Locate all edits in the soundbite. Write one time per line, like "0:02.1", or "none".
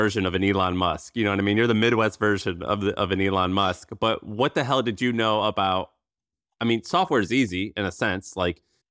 none